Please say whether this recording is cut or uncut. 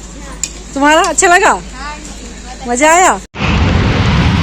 cut